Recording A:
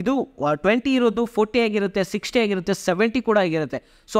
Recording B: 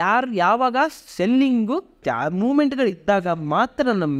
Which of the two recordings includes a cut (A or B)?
B